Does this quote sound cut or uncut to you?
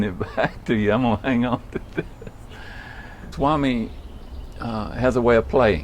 uncut